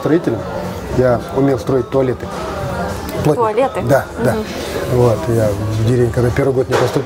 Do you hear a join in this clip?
no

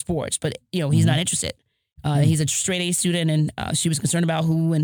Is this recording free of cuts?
yes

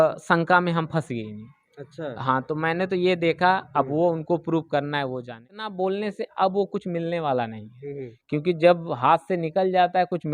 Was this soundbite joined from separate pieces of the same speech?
yes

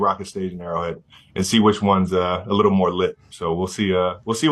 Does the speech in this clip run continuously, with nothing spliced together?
yes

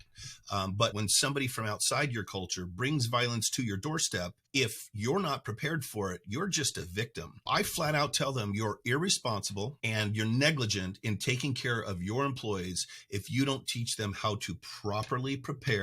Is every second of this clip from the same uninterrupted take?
no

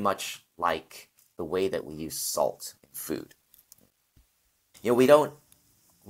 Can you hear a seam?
yes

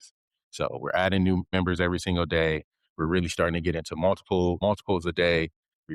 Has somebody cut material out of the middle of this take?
yes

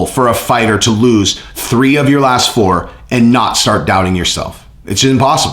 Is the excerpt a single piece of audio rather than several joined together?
yes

